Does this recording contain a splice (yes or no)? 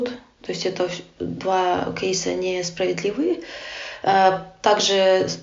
no